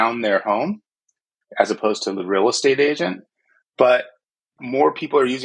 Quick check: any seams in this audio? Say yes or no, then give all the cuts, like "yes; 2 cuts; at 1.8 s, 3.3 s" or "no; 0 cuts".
yes; 1 cut; at 4.5 s